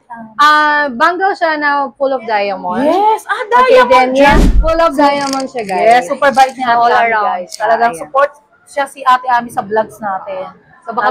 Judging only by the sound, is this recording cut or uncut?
cut